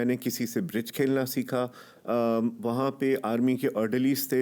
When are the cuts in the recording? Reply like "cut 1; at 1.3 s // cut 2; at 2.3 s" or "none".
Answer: none

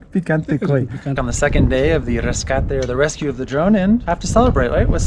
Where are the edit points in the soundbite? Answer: cut 1; at 1.2 s // cut 2; at 4.1 s

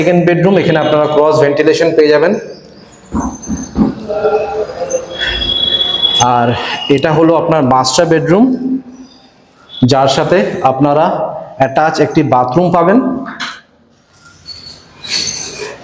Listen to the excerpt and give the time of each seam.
none

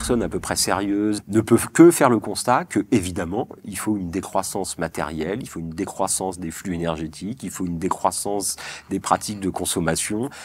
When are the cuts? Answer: cut 1; at 1.2 s

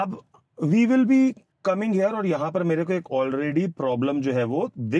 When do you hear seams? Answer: none

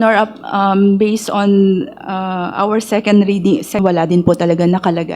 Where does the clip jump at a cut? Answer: cut 1; at 3.8 s

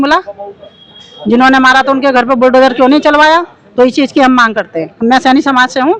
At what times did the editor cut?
none

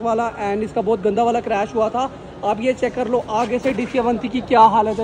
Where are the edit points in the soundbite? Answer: none

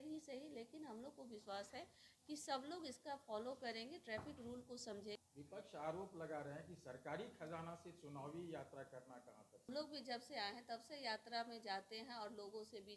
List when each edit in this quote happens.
cut 1; at 5.2 s // cut 2; at 9.7 s

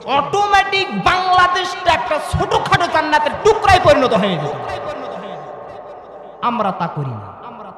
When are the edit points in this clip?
none

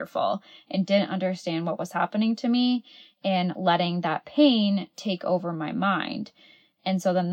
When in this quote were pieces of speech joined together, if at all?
none

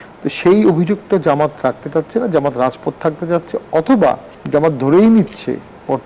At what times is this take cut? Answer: cut 1; at 4.3 s

